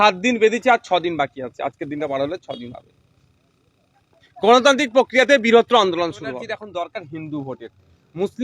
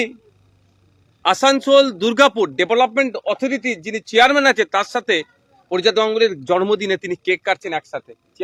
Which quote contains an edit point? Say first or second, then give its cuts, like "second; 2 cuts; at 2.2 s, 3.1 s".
first; 1 cut; at 6.5 s